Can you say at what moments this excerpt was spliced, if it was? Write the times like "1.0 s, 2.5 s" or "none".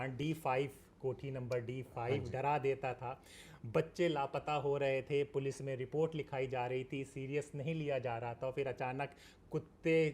none